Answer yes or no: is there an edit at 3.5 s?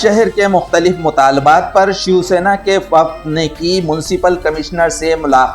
no